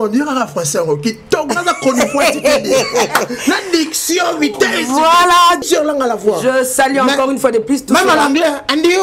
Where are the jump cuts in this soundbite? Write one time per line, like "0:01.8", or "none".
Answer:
0:05.6